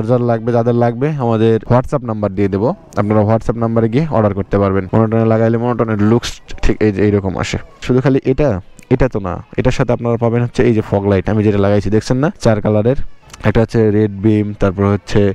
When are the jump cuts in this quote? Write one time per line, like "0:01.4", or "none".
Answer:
0:01.6
0:04.9
0:07.8
0:12.4